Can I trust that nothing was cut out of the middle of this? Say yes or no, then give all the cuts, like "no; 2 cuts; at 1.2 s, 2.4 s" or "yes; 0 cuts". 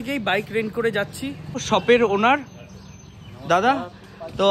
yes; 0 cuts